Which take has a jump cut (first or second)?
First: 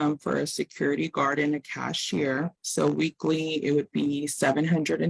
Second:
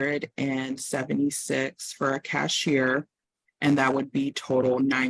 first